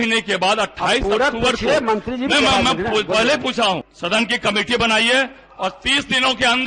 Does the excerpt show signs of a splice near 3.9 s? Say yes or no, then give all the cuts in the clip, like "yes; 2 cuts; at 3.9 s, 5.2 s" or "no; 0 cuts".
yes; 1 cut; at 3.9 s